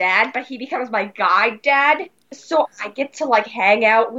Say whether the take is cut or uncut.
cut